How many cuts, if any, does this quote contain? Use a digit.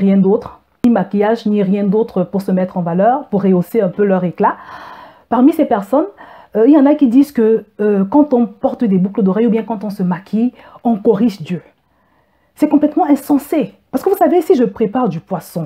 1